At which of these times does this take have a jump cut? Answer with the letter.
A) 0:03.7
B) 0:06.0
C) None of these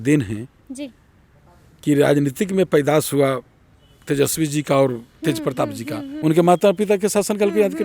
B